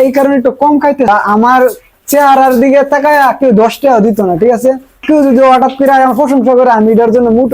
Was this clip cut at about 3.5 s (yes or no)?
no